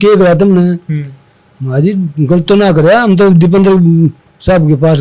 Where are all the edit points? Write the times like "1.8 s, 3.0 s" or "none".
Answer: none